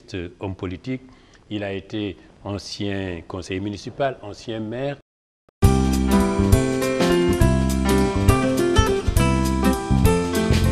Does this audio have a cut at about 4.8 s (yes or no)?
no